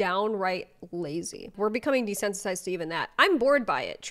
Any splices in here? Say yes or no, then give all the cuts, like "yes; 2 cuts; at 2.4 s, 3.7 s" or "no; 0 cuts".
yes; 1 cut; at 1.4 s